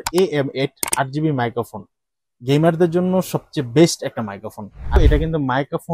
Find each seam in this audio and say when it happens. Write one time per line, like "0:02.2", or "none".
0:05.0